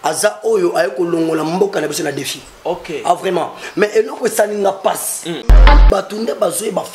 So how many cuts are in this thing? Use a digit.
1